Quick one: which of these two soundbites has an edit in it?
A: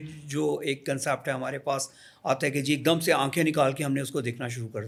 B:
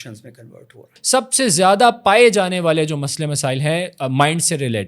B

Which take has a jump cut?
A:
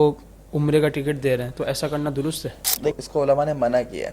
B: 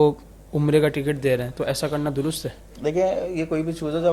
A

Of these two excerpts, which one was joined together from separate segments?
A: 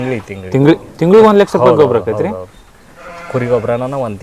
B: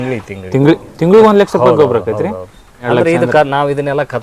B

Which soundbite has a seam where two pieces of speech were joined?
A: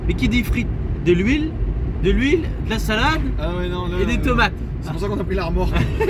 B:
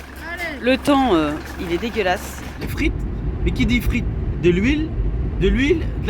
B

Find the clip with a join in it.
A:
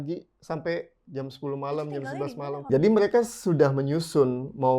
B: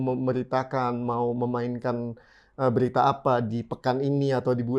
A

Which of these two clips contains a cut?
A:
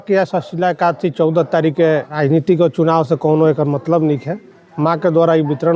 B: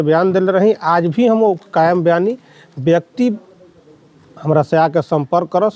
A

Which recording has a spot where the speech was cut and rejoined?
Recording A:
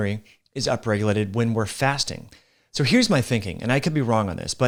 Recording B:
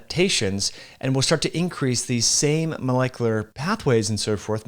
B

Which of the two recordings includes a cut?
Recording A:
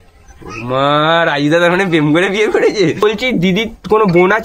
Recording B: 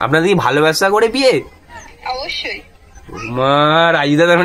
A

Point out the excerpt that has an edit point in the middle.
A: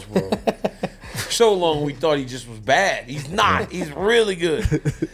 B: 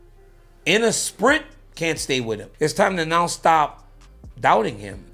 B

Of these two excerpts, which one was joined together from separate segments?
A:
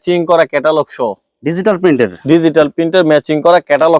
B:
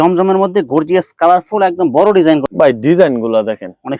B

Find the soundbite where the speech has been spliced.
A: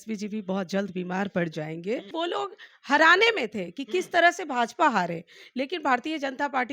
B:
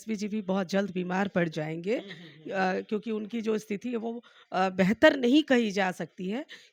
A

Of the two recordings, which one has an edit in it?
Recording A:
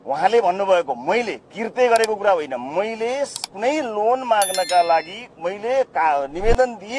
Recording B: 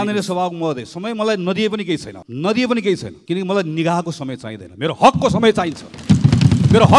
B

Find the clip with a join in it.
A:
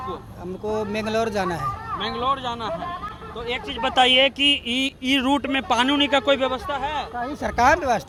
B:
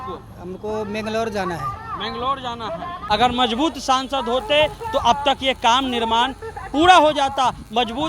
B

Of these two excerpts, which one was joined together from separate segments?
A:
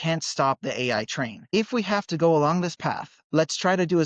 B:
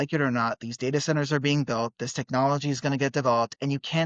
A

